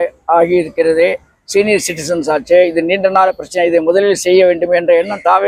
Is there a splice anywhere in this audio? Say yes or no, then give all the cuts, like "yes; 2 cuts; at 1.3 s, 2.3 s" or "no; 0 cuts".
no; 0 cuts